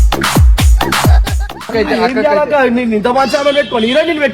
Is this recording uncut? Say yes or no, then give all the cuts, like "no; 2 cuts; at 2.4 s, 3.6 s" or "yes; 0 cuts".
no; 1 cut; at 1.7 s